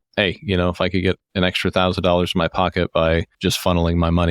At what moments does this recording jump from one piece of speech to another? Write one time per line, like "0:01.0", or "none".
0:03.3